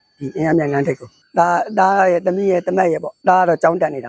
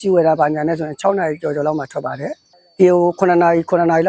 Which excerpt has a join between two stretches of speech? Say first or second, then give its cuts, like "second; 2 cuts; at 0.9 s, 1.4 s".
first; 2 cuts; at 1.1 s, 3.1 s